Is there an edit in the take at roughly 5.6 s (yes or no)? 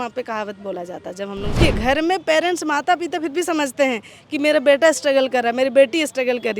no